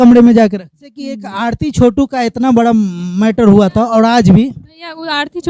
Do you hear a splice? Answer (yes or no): yes